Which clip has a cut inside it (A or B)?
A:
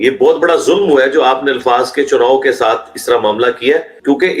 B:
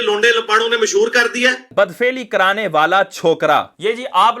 B